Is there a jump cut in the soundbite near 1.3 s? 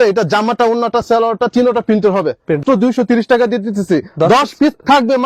no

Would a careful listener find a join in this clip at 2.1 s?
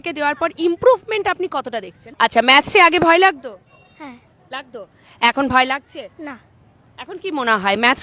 yes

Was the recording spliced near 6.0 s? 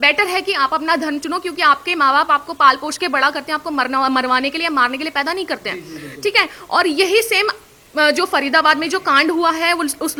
no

